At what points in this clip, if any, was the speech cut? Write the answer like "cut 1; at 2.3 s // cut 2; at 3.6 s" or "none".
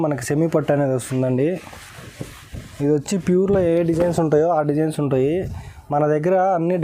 none